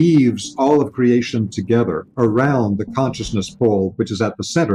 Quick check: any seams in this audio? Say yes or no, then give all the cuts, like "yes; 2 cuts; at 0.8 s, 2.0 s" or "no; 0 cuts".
no; 0 cuts